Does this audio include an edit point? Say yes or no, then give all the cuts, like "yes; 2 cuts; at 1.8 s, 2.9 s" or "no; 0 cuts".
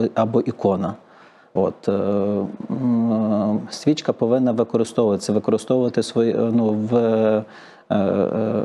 no; 0 cuts